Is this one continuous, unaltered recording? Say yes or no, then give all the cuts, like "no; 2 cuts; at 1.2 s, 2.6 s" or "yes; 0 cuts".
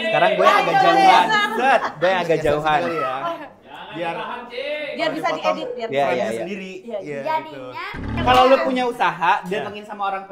no; 1 cut; at 8.1 s